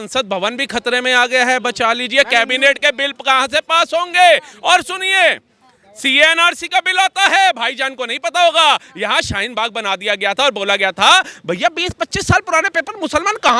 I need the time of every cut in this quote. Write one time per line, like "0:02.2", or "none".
none